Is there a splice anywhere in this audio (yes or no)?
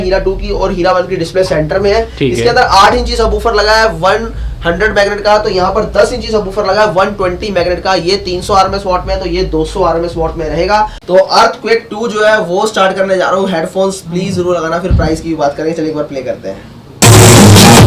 yes